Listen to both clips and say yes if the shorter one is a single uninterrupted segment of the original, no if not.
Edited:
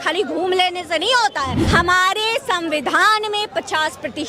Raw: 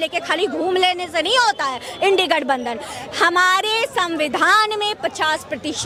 no